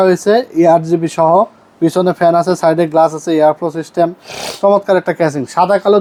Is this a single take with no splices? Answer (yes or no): yes